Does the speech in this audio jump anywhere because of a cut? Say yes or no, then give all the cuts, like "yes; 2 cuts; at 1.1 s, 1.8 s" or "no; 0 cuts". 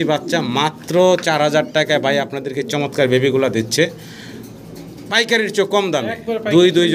no; 0 cuts